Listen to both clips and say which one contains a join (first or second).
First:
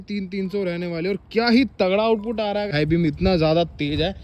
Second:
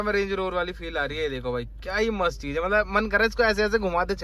first